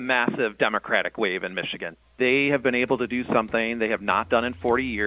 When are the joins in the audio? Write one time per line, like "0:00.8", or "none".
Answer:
0:02.0